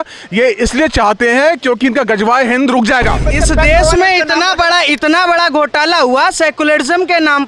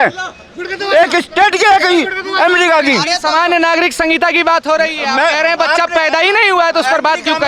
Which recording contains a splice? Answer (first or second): first